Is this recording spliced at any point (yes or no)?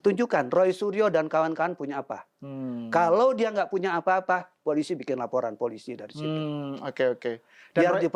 no